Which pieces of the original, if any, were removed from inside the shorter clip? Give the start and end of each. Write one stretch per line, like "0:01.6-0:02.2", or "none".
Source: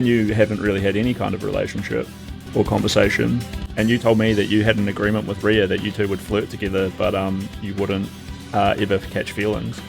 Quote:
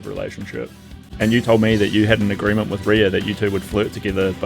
0:02.4-0:03.6